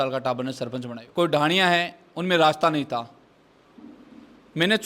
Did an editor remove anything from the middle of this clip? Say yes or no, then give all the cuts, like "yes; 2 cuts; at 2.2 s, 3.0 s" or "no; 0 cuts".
yes; 1 cut; at 1.0 s